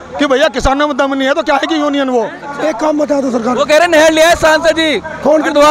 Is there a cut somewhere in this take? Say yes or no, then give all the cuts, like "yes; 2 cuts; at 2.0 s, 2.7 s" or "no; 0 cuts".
yes; 1 cut; at 2.5 s